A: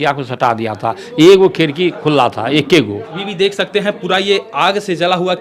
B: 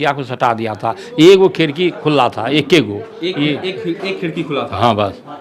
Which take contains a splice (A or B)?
A